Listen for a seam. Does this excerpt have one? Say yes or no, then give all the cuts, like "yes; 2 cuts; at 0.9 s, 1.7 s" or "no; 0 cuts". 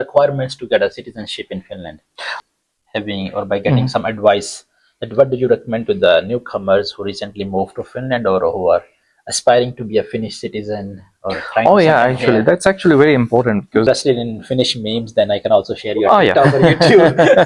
yes; 2 cuts; at 2.3 s, 13.8 s